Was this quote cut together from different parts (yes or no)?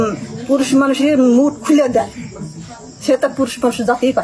no